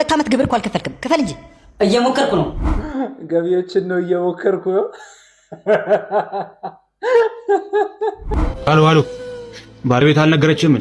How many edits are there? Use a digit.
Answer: 2